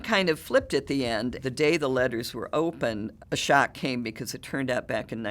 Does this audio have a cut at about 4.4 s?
no; 2 cuts; at 1.4 s, 3.1 s

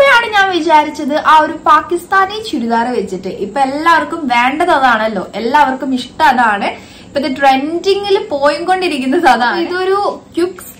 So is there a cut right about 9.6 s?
yes; 1 cut; at 9.6 s

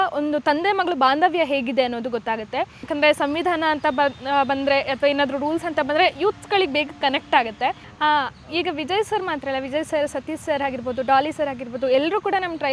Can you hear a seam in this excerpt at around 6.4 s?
no; 2 cuts; at 2.8 s, 7.9 s

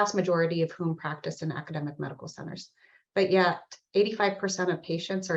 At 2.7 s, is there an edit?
no; 0 cuts

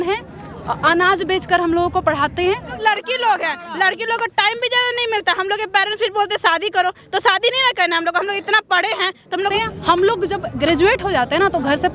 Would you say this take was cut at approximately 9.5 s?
yes; 2 cuts; at 2.7 s, 9.5 s

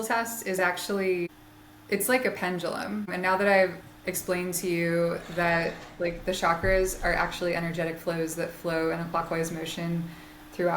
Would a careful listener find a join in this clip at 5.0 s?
no; 2 cuts; at 1.4 s, 3.1 s

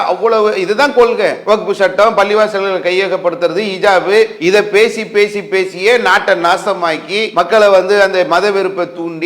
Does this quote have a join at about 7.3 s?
yes; 3 cuts; at 1.4 s, 4.4 s, 7.3 s

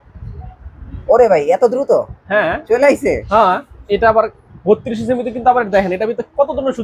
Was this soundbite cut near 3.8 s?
yes; 1 cut; at 3.8 s

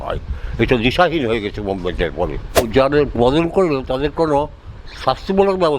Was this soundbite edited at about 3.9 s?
no; 1 cut; at 2.7 s

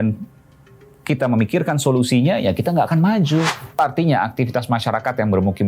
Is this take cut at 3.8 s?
yes; 1 cut; at 3.8 s

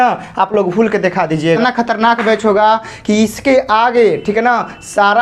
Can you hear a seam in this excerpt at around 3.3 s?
no; 1 cut; at 1.6 s

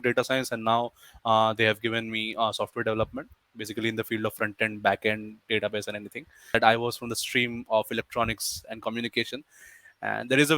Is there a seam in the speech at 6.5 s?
yes; 1 cut; at 6.5 s

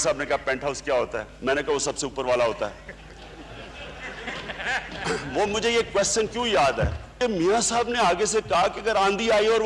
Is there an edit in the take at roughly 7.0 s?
yes; 1 cut; at 7.0 s

